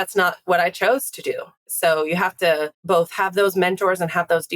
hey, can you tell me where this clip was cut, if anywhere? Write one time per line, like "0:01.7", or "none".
0:01.7
0:02.7